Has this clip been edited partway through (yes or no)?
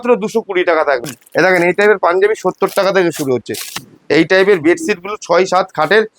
yes